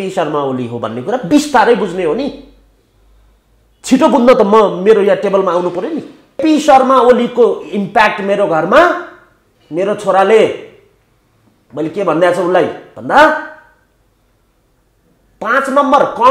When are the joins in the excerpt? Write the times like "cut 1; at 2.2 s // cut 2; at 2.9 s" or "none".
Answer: cut 1; at 6.4 s